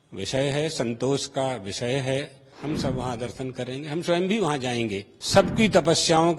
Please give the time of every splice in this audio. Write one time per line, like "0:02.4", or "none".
0:02.5
0:05.1